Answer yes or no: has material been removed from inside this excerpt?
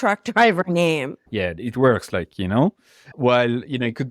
yes